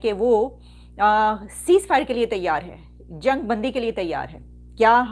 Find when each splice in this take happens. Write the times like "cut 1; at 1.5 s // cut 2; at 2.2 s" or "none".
none